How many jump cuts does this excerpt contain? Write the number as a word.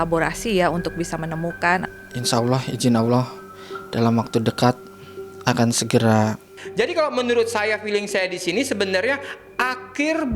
two